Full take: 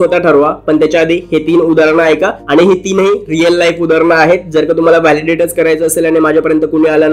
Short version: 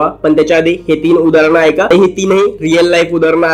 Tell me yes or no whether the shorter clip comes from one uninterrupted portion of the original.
no